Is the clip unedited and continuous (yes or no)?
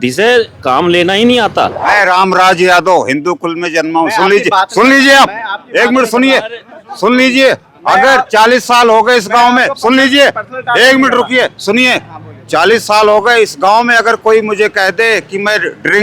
no